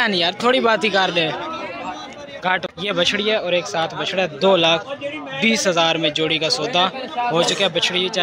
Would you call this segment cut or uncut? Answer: cut